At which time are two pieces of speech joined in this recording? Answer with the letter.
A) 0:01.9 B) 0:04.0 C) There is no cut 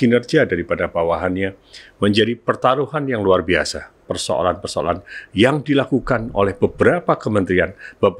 B